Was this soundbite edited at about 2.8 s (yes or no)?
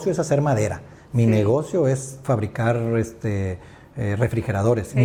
no